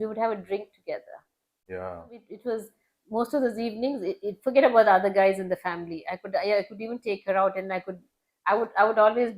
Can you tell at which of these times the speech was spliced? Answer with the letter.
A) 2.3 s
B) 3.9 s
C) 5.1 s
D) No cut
A